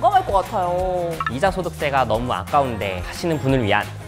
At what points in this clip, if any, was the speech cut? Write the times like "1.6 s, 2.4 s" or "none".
1.3 s